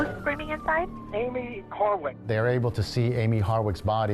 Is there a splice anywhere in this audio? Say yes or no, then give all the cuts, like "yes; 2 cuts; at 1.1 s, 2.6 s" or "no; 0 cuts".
yes; 2 cuts; at 1.0 s, 2.2 s